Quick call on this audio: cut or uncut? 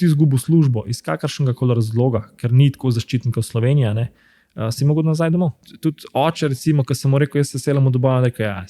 cut